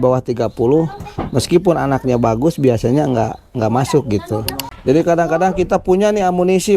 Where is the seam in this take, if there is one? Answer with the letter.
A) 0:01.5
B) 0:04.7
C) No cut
B